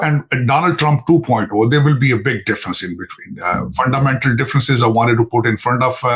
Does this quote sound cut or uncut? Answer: uncut